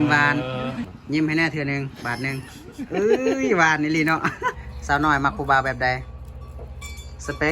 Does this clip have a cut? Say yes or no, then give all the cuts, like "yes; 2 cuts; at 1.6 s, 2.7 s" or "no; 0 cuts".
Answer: yes; 2 cuts; at 0.9 s, 4.6 s